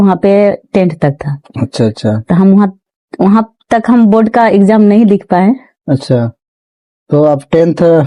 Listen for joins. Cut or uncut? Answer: uncut